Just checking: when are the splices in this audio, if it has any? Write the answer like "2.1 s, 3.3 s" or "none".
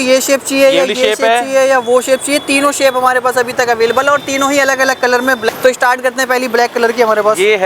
none